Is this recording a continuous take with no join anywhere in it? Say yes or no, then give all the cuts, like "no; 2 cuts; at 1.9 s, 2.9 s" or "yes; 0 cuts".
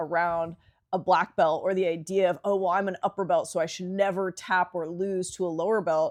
yes; 0 cuts